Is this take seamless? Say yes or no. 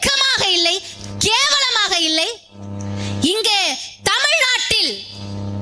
yes